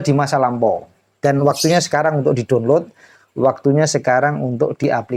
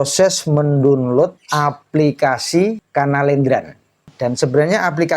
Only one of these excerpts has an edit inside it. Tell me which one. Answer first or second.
second